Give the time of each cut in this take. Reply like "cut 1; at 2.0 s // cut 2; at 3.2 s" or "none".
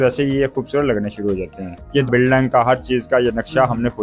cut 1; at 2.1 s